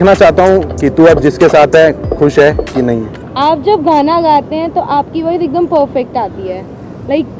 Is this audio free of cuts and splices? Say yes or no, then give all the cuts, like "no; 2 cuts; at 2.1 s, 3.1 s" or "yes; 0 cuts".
no; 1 cut; at 3.2 s